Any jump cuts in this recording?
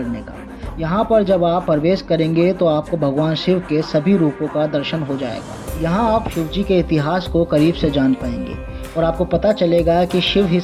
no; 0 cuts

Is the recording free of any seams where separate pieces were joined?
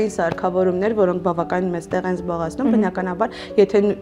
yes; 0 cuts

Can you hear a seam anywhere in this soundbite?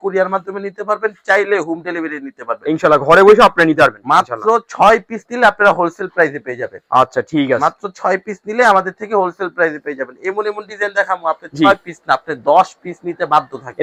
no; 0 cuts

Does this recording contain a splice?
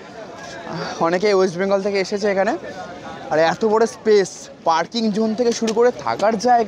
no; 0 cuts

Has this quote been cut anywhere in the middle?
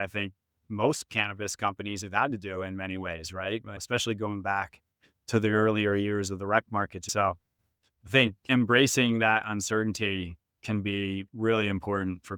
yes; 3 cuts; at 3.8 s, 7.1 s, 8.4 s

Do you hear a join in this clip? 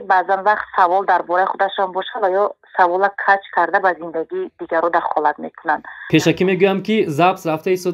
yes; 1 cut; at 5.9 s

